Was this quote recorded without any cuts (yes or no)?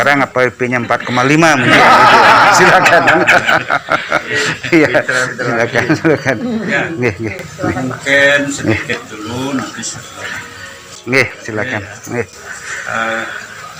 yes